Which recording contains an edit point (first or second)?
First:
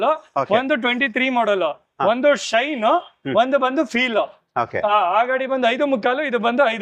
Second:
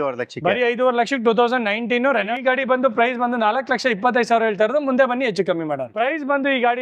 second